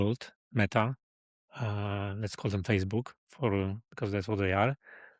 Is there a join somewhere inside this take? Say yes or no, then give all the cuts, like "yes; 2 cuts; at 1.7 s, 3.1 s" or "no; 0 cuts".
no; 0 cuts